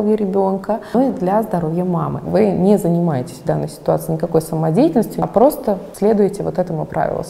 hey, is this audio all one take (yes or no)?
no